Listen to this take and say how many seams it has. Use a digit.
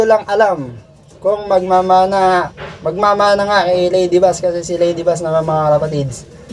0